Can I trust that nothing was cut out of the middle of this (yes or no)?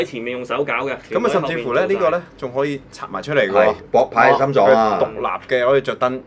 yes